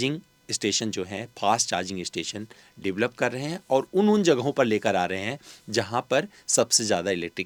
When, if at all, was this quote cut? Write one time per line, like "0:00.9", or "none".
none